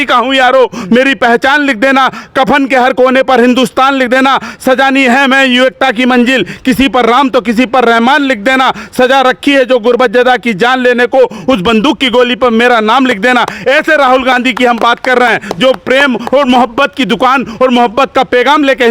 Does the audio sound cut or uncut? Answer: uncut